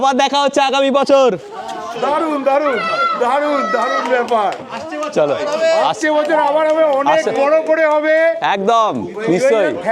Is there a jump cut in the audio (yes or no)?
no